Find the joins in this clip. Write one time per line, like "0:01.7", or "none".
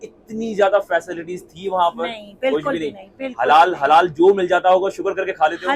none